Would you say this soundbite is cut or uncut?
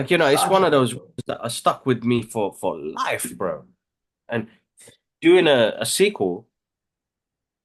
uncut